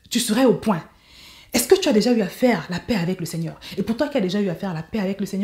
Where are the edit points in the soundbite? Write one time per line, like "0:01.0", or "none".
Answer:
none

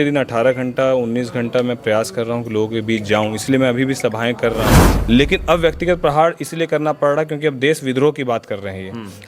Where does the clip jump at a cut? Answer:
0:04.9

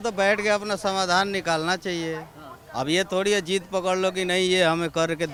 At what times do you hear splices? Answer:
none

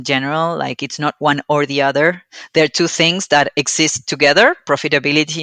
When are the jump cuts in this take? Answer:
none

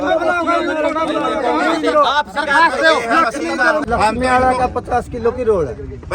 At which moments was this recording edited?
0:03.9

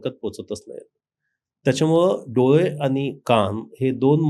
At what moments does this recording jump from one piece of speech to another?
none

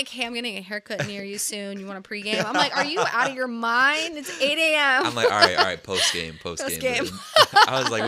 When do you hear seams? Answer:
none

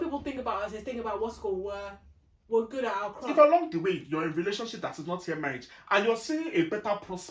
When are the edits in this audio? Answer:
0:03.2

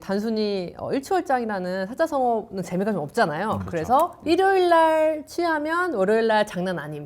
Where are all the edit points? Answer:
0:04.2

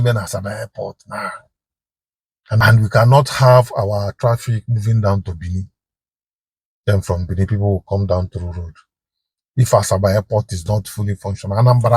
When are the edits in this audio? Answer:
0:02.6

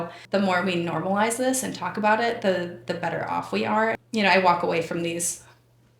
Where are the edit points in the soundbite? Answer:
0:04.0

